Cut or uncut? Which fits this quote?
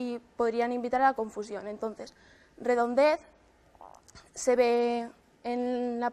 uncut